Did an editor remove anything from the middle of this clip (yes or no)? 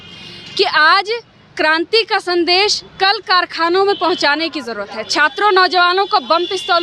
no